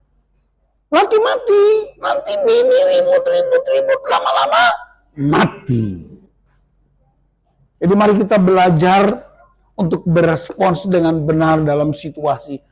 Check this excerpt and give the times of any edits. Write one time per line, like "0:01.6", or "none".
0:06.3